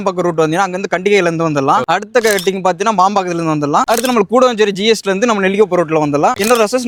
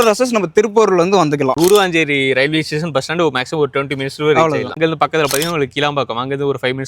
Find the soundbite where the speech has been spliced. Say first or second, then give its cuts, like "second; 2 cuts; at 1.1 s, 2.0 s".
second; 2 cuts; at 1.5 s, 4.7 s